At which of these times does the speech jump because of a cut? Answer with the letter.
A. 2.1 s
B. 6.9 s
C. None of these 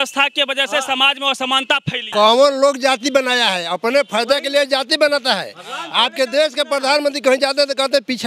A